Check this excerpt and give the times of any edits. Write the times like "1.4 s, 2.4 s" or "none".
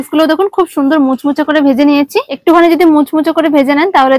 2.3 s